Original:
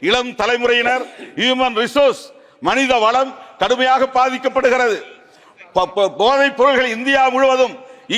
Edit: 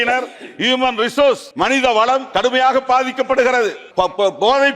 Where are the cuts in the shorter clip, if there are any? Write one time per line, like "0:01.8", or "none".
0:01.5
0:02.3
0:03.8